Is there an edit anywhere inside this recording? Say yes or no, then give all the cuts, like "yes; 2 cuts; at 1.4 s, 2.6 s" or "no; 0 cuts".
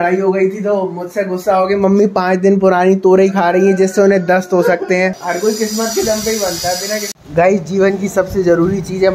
yes; 2 cuts; at 5.2 s, 7.2 s